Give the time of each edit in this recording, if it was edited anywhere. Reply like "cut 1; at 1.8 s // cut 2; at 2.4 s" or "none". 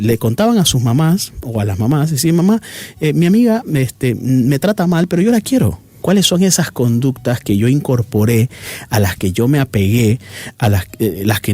cut 1; at 6.0 s